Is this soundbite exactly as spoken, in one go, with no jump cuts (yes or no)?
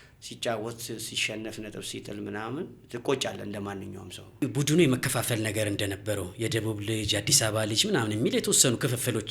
no